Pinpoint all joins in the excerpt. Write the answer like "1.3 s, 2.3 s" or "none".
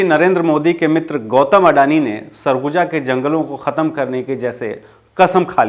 none